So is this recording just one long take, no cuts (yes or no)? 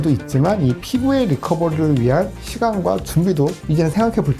yes